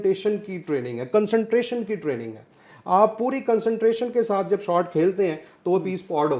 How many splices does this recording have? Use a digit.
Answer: 0